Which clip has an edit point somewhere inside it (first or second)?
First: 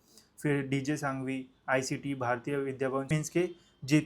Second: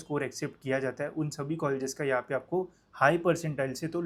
first